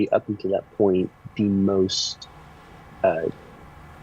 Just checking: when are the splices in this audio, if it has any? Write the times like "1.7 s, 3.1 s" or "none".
none